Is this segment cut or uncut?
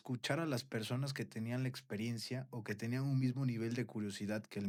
uncut